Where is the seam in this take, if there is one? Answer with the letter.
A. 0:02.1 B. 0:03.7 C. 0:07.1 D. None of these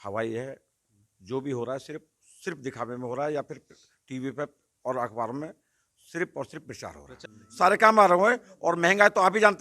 C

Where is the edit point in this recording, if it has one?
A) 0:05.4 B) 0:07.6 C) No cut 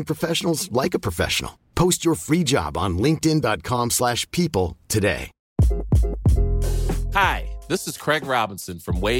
A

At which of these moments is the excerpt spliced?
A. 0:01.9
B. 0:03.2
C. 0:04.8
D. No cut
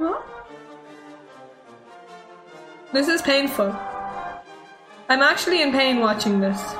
A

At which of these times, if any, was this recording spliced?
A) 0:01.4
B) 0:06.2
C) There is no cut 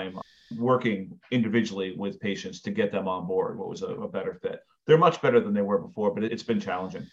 C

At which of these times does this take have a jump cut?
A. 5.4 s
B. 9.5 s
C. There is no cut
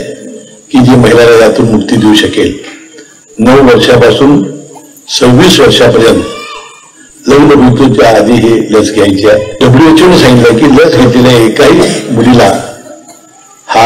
B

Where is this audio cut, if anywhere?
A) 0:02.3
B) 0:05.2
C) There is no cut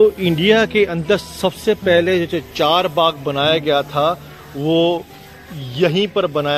C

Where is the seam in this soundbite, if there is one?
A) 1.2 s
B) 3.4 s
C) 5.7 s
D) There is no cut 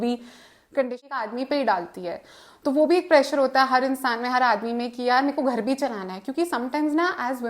A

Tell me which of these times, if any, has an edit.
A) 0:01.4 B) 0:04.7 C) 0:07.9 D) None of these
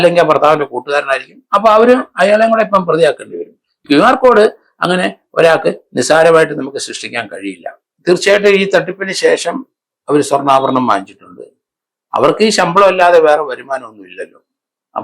C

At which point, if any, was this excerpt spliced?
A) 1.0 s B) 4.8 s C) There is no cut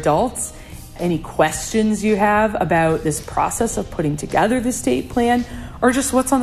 A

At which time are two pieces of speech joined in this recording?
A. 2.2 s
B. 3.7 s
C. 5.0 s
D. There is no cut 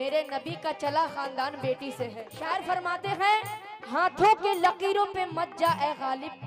A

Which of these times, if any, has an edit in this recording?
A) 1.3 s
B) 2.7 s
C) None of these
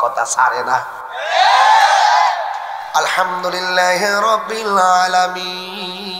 B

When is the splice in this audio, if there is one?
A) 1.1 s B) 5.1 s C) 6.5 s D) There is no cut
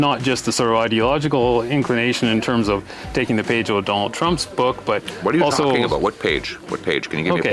C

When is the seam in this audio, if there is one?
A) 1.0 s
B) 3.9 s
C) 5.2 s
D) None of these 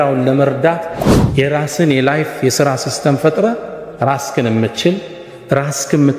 A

